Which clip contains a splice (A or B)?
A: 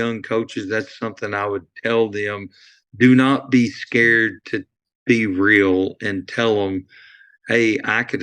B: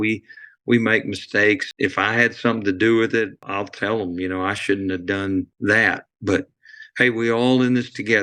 B